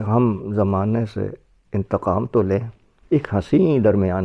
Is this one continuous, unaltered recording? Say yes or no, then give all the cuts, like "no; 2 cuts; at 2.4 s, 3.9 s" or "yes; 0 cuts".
no; 1 cut; at 2.9 s